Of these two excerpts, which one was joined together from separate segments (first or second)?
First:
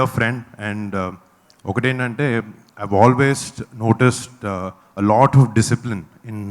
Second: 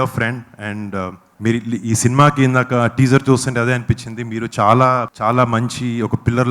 second